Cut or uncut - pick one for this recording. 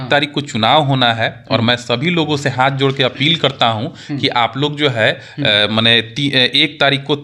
uncut